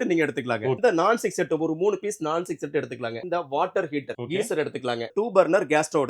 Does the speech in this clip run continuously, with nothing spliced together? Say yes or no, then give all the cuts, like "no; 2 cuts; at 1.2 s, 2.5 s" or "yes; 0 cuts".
no; 4 cuts; at 0.8 s, 3.2 s, 4.2 s, 5.1 s